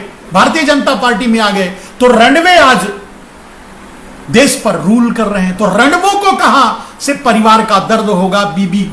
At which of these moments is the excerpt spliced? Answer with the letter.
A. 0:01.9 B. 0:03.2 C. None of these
C